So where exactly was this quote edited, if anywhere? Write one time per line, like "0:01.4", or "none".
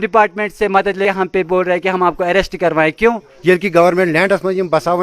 0:01.0
0:03.2

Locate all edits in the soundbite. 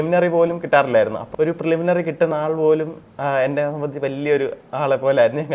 0:01.2

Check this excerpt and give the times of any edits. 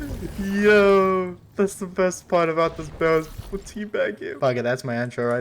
0:04.3

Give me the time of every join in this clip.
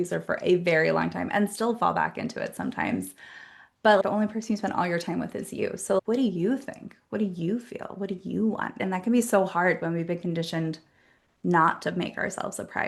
0:04.1

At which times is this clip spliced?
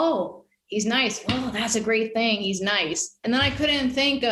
0:03.2

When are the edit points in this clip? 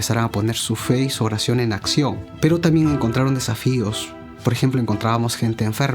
0:02.3

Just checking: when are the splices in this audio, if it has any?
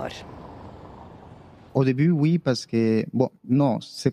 0:01.6

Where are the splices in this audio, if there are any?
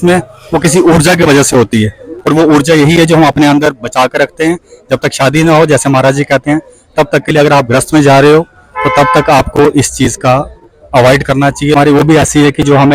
0:11.8

